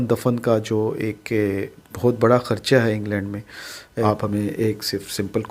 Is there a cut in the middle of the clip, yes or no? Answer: yes